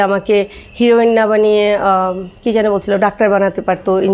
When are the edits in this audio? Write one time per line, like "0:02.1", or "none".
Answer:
none